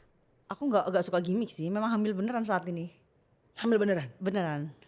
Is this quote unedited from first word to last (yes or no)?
yes